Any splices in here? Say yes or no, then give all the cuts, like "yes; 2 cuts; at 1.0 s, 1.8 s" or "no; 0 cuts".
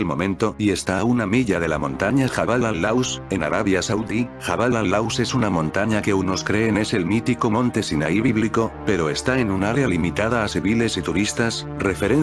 yes; 1 cut; at 4.0 s